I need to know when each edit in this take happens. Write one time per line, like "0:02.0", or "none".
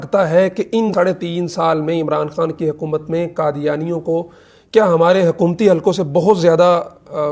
0:00.9

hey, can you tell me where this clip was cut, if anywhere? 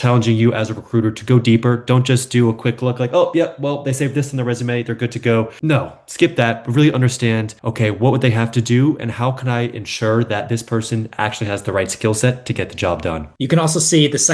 none

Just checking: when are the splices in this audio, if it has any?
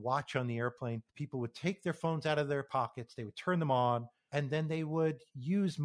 0:01.1
0:04.2

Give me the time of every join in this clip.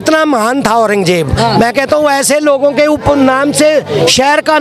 none

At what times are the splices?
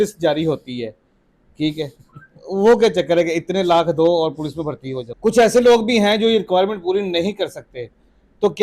0:05.0

